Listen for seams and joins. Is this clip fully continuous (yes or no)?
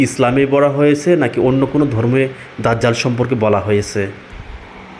yes